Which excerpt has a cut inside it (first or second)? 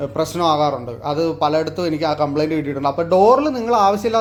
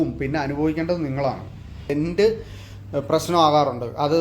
second